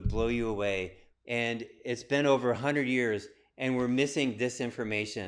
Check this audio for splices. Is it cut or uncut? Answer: cut